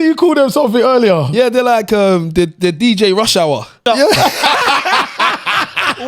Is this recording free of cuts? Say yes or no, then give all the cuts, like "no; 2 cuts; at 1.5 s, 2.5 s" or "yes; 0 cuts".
no; 1 cut; at 3.8 s